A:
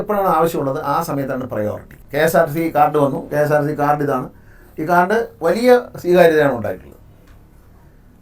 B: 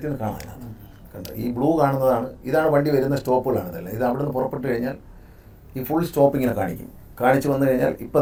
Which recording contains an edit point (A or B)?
A